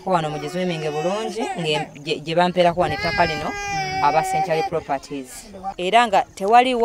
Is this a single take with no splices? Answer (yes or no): no